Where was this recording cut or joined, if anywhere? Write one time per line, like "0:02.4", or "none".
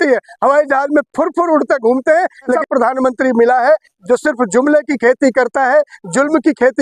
0:02.6